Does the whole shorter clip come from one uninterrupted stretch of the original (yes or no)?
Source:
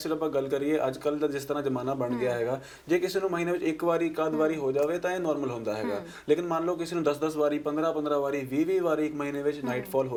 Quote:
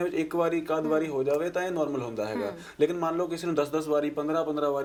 yes